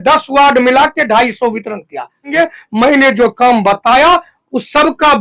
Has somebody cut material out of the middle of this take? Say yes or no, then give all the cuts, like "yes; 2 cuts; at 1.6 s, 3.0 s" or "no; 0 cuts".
yes; 1 cut; at 2.3 s